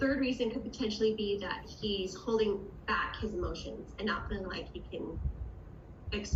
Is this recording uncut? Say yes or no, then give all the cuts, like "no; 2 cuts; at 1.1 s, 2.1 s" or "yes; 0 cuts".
yes; 0 cuts